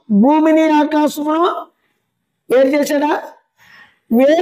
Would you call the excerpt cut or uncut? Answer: uncut